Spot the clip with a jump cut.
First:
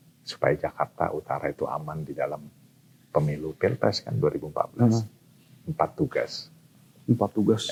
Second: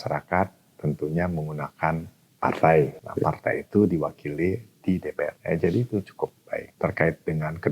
second; 4 cuts; at 2.2 s, 3.0 s, 5.4 s, 6.7 s

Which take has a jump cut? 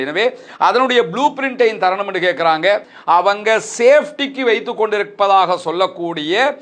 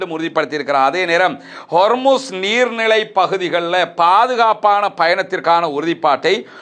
first; 1 cut; at 2.9 s

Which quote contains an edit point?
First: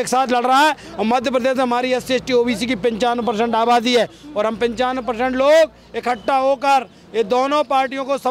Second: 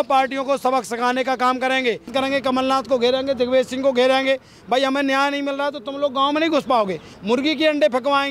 second; 2 cuts; at 2.1 s, 7.1 s

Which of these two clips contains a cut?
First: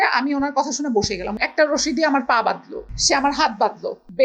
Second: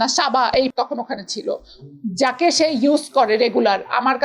first; 2 cuts; at 1.4 s, 2.9 s

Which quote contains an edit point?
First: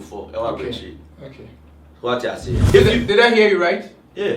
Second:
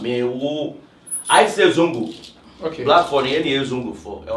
first; 1 cut; at 2.6 s

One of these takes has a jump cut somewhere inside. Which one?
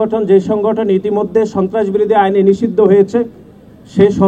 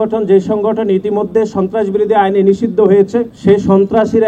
second; 1 cut; at 3.3 s

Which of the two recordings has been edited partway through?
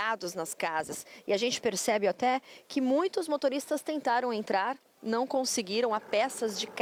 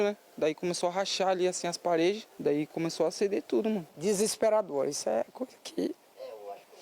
second; 2 cuts; at 2.3 s, 3.9 s

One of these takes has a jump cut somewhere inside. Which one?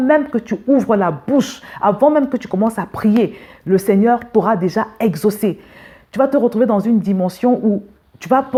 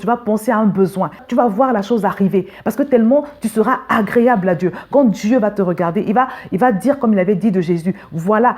second; 1 cut; at 1.2 s

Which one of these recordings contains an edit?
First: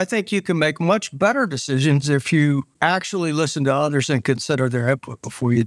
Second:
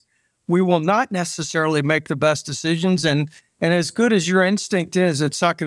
first; 1 cut; at 2.7 s

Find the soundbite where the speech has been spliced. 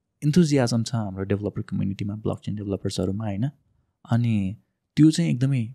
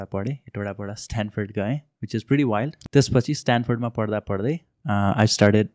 second; 1 cut; at 2.8 s

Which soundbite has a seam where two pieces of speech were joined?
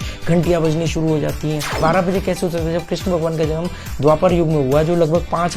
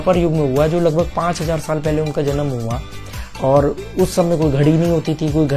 first; 1 cut; at 1.7 s

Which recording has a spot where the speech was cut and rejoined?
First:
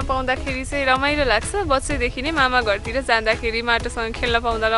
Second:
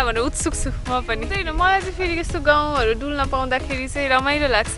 second; 1 cut; at 1.4 s

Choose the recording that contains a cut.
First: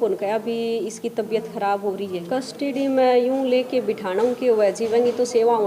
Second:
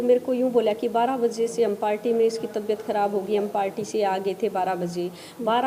first; 1 cut; at 2.2 s

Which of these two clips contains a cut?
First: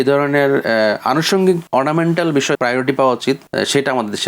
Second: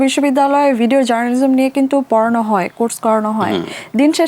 first; 3 cuts; at 1.6 s, 2.6 s, 3.4 s

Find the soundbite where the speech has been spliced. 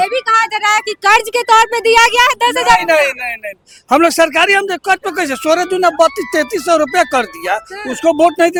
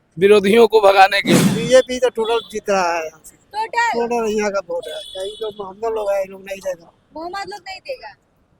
second; 1 cut; at 1.5 s

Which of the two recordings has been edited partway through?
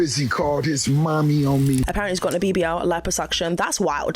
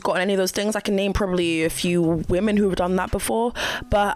first; 1 cut; at 1.9 s

